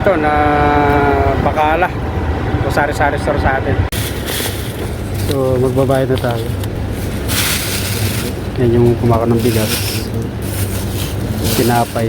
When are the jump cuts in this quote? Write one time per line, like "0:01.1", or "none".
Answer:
0:03.9
0:06.7